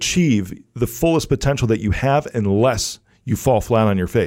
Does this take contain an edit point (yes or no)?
no